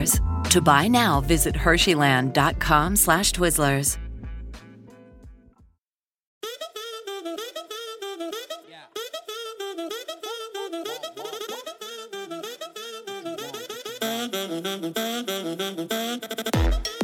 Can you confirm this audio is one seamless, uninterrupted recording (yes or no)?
no